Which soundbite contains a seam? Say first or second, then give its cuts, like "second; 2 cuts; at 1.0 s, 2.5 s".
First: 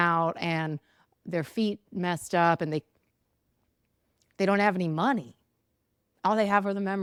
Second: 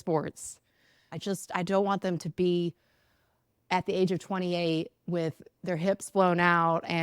second; 1 cut; at 1.0 s